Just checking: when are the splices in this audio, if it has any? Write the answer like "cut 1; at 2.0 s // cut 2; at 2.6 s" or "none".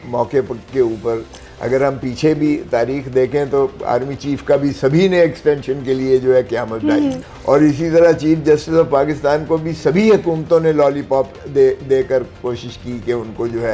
cut 1; at 7.3 s